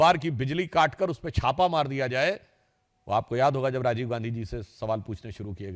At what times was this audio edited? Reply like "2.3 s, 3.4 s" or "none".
none